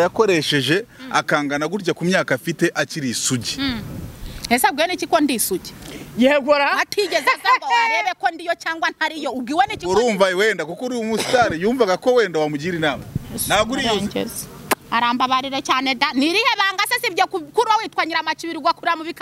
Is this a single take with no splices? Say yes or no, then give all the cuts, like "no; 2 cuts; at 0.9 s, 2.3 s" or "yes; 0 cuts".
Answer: yes; 0 cuts